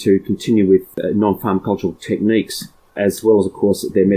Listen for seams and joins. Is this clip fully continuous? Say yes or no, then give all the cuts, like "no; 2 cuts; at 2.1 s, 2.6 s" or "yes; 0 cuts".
yes; 0 cuts